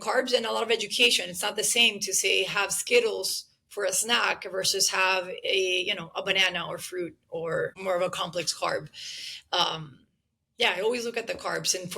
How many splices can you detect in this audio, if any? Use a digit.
1